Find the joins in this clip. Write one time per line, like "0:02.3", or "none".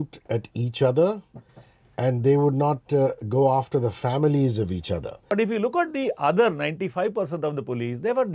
0:05.3